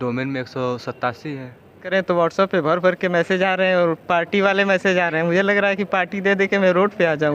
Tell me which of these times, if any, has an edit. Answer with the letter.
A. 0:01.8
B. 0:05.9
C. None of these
A